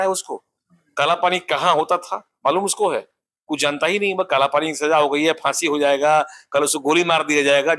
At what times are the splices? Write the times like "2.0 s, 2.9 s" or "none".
none

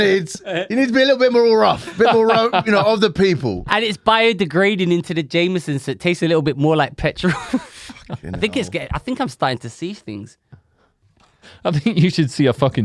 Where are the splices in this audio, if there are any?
11.1 s

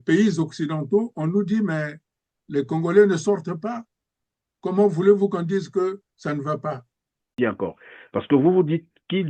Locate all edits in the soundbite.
7.4 s

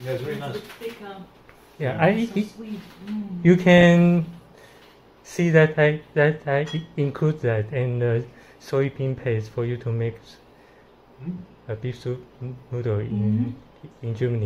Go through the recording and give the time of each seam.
none

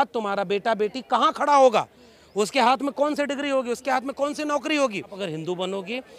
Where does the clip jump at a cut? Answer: 5.2 s

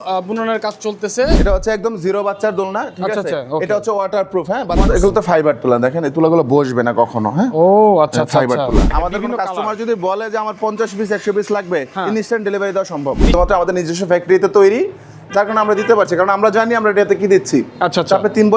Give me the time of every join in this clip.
1.4 s, 4.9 s, 8.9 s, 13.3 s

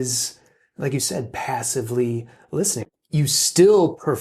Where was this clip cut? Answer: 2.8 s

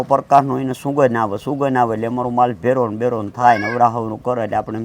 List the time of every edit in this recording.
none

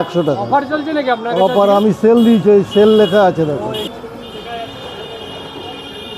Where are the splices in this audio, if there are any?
3.9 s

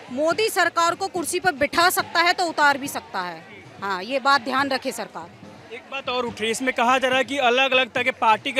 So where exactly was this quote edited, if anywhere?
none

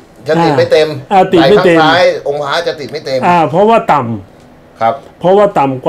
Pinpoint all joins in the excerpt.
none

